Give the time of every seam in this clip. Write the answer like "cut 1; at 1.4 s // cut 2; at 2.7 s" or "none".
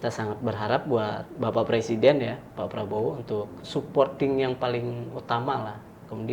cut 1; at 3.6 s